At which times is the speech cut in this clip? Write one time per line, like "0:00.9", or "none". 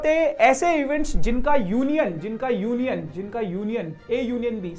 none